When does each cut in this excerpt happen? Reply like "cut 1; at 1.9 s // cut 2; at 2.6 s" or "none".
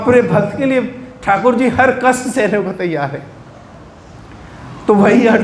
cut 1; at 3.7 s

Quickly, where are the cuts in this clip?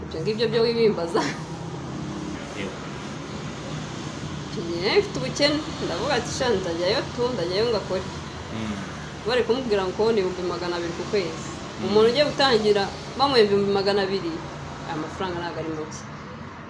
cut 1; at 2.4 s

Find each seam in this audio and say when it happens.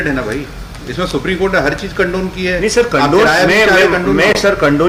none

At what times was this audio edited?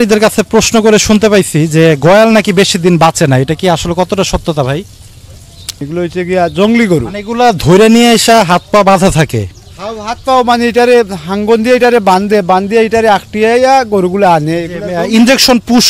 cut 1; at 5.8 s

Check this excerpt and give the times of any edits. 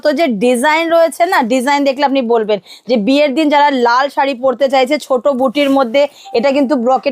none

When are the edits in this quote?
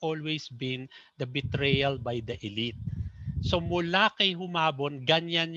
none

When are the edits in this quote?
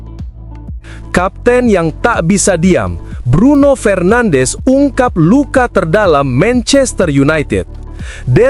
cut 1; at 1.1 s

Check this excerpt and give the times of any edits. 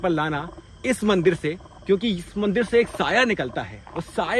none

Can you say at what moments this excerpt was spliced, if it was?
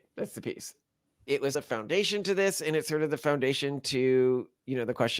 cut 1; at 1.5 s

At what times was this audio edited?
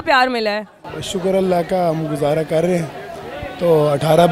none

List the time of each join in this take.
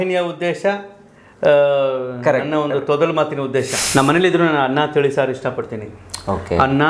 cut 1; at 3.8 s

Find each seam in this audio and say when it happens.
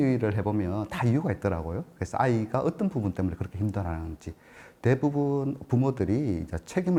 none

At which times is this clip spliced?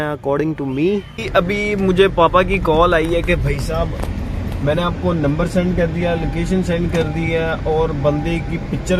cut 1; at 1.2 s

